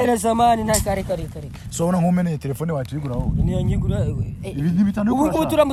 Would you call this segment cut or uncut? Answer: uncut